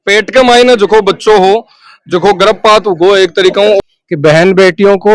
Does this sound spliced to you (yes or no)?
yes